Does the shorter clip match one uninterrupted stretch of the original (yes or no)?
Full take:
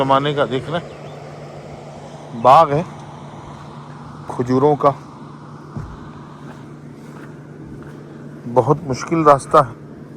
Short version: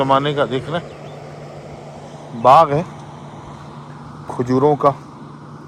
yes